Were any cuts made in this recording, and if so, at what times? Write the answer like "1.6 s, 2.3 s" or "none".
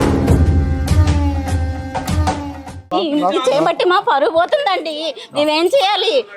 none